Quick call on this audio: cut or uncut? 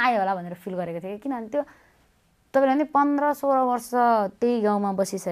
uncut